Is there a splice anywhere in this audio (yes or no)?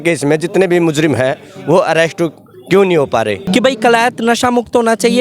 yes